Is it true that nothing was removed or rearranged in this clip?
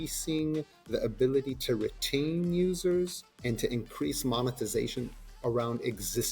no; 2 cuts; at 3.3 s, 5.2 s

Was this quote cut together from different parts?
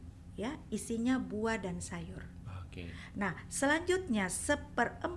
no; 0 cuts

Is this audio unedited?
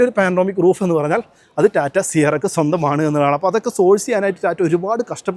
yes; 0 cuts

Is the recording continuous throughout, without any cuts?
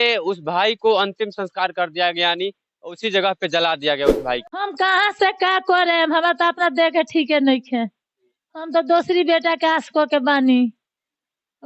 no; 1 cut; at 4.4 s

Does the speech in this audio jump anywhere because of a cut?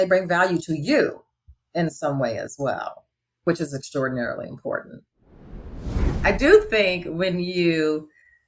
yes; 1 cut; at 5.7 s

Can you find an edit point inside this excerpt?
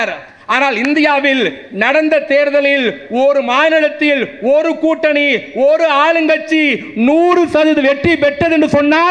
no; 0 cuts

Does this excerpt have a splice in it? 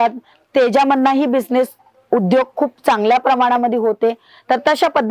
no; 0 cuts

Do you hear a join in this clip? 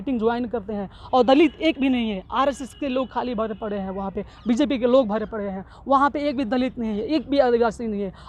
no; 0 cuts

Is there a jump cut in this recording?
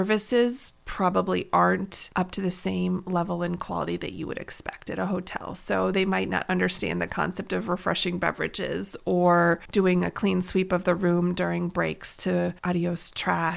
yes; 3 cuts; at 2.0 s, 9.6 s, 12.6 s

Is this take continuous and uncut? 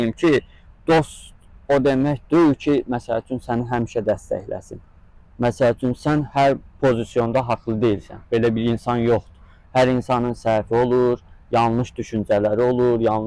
yes; 0 cuts

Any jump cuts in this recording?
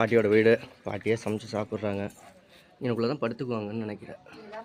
no; 0 cuts

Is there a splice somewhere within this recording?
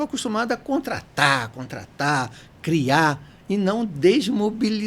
no; 0 cuts

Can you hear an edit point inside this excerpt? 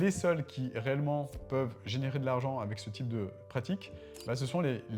no; 0 cuts

